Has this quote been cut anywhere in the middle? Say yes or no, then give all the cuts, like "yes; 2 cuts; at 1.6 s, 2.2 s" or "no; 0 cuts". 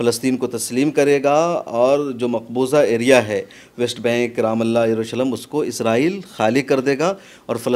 no; 0 cuts